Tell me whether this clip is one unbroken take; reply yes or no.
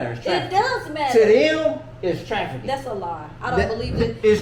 yes